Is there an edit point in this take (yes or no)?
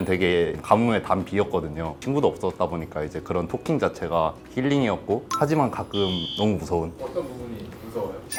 no